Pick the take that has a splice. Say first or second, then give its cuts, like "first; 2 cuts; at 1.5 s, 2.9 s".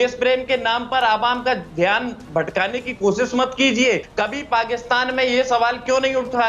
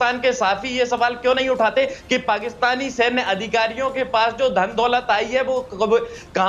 first; 1 cut; at 4.1 s